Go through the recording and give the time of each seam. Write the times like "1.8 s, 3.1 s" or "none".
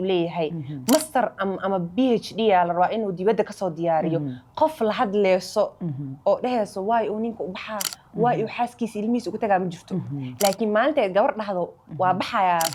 none